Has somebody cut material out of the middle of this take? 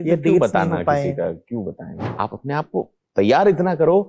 yes; 1 cut; at 2.1 s

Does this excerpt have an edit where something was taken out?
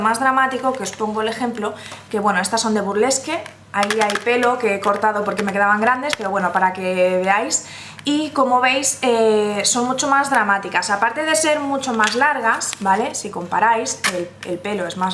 no; 0 cuts

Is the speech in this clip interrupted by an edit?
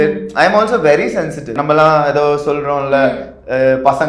yes; 1 cut; at 1.5 s

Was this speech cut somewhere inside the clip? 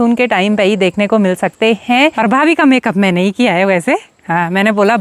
yes; 1 cut; at 2.2 s

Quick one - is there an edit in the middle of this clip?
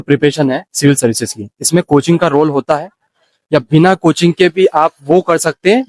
no; 0 cuts

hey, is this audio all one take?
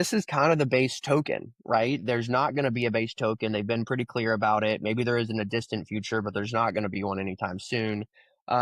yes; 0 cuts

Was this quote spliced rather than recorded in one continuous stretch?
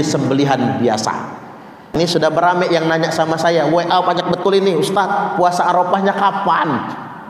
yes; 1 cut; at 1.9 s

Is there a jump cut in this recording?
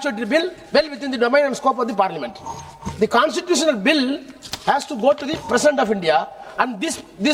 no; 0 cuts

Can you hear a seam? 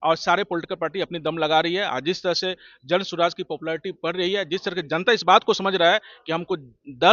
no; 0 cuts

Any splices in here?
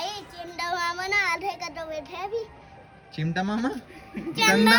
no; 0 cuts

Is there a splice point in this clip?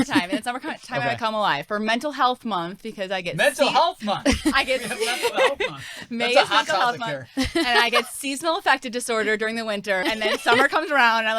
yes; 1 cut; at 10.0 s

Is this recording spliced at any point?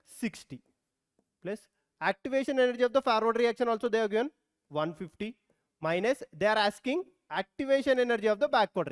no; 0 cuts

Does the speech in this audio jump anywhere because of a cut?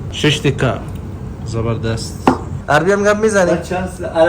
yes; 1 cut; at 2.5 s

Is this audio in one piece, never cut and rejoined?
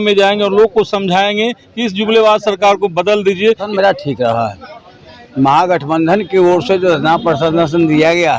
no; 1 cut; at 3.6 s

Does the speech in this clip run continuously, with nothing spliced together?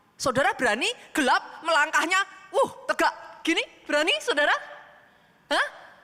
yes; 0 cuts

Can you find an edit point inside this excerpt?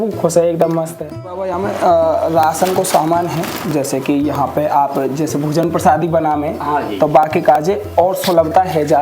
yes; 1 cut; at 1.4 s

